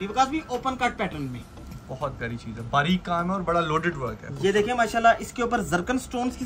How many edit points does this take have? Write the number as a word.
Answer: zero